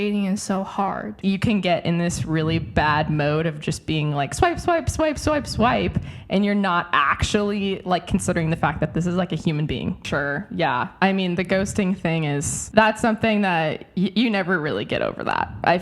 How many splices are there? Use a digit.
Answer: 2